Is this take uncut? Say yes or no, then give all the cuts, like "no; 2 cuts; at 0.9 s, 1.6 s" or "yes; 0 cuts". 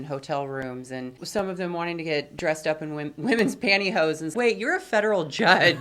no; 2 cuts; at 1.2 s, 4.3 s